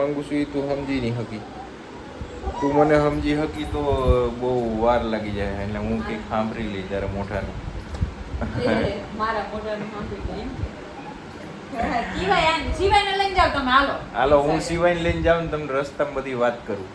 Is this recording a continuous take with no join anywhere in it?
yes; 0 cuts

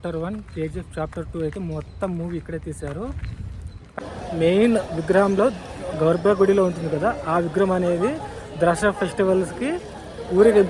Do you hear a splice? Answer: yes; 1 cut; at 4.0 s

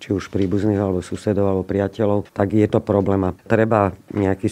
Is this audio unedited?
no; 2 cuts; at 2.3 s, 3.4 s

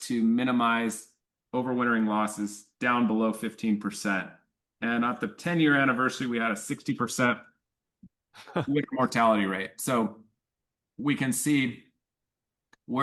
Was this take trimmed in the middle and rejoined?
no; 0 cuts

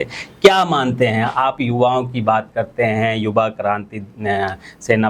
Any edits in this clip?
no; 0 cuts

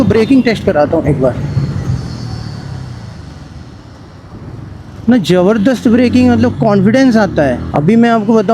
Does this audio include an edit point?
yes; 1 cut; at 7.6 s

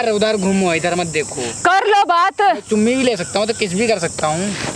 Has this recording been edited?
no; 0 cuts

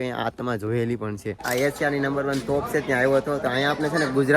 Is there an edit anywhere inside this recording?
yes; 1 cut; at 1.4 s

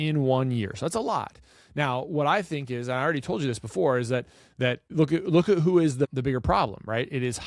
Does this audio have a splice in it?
yes; 2 cuts; at 4.9 s, 6.1 s

